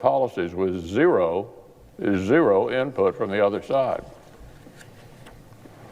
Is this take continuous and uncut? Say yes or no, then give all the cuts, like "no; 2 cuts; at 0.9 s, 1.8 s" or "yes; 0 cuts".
no; 1 cut; at 3.6 s